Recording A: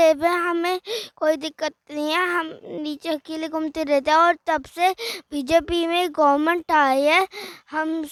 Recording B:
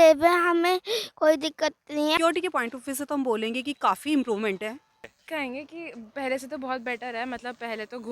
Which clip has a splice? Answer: B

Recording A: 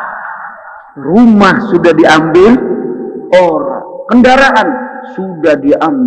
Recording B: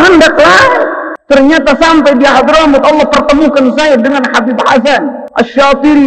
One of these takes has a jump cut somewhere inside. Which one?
B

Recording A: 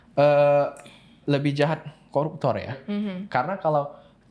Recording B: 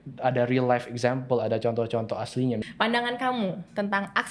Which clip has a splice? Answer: B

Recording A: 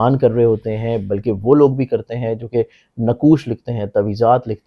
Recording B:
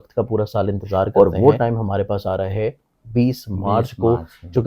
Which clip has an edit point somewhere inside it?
B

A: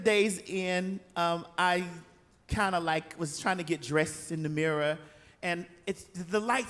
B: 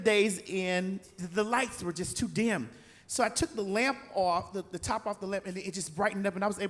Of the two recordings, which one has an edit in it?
B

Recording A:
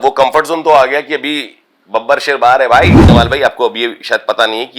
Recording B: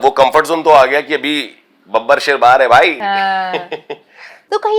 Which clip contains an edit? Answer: A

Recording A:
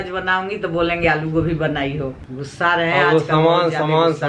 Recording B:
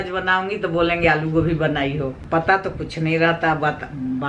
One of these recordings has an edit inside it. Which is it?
A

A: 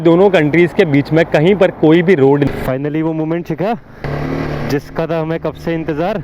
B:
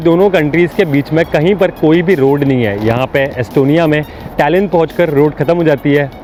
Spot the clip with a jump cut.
A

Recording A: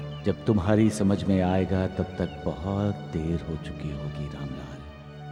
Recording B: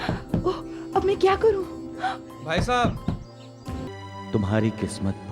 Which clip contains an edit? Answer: B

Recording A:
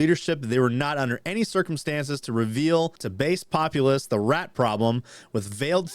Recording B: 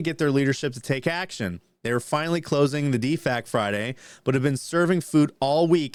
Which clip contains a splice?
A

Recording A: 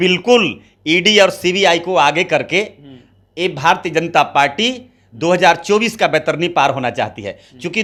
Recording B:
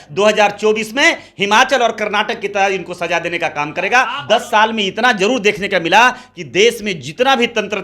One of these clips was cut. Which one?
B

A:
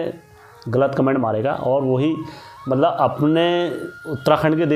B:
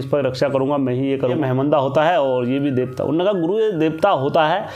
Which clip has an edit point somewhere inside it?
B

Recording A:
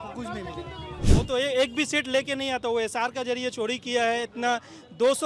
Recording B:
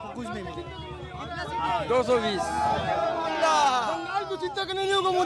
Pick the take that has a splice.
A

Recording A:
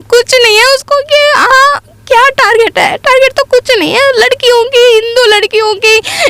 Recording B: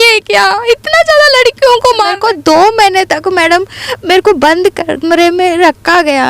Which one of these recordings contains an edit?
B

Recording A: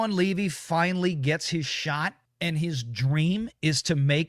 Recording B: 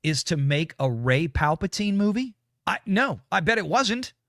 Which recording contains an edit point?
A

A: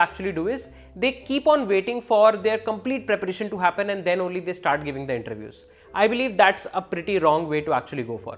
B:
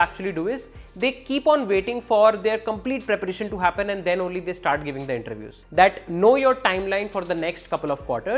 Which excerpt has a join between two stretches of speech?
B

